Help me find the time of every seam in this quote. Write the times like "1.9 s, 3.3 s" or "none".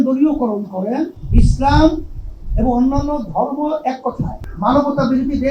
1.2 s, 4.4 s